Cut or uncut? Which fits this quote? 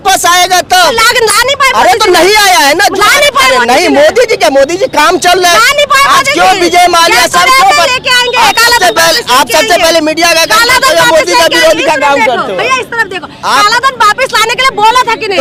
uncut